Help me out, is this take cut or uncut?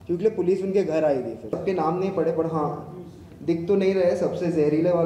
cut